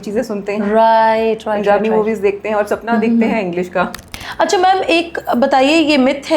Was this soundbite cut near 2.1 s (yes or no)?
no